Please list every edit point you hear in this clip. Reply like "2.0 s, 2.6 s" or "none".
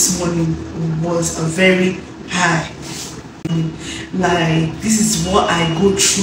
3.5 s